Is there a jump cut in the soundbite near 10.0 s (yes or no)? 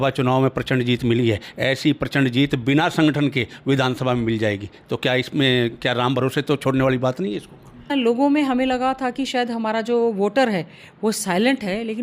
no